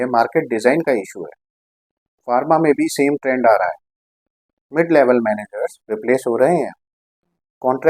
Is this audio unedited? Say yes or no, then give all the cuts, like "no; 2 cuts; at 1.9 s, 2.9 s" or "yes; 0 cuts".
yes; 0 cuts